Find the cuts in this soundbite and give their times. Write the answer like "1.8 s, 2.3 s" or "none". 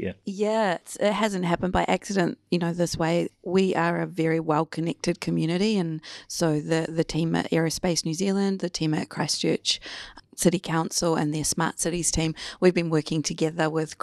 0.8 s, 3.3 s